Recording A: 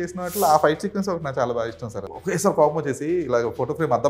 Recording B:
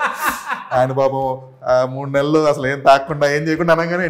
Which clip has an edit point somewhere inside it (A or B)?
A